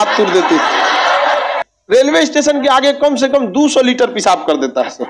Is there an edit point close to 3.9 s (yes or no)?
no